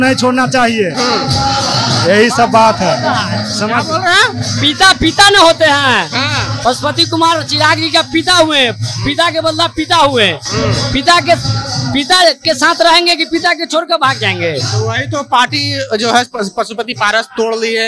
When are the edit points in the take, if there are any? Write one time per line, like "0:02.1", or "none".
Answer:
none